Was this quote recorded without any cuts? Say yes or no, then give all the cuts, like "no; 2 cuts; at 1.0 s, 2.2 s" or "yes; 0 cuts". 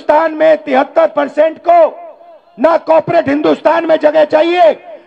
yes; 0 cuts